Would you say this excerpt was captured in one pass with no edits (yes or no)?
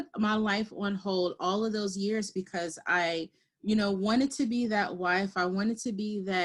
yes